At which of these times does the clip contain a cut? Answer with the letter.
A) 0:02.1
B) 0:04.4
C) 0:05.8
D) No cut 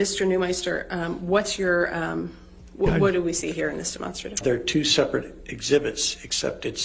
B